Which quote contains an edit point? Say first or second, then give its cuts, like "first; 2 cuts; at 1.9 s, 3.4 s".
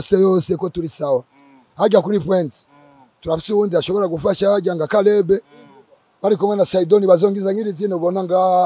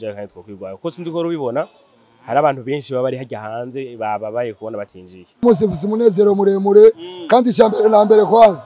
second; 1 cut; at 5.4 s